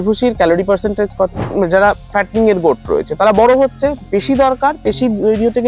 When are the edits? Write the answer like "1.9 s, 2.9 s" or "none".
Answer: 1.4 s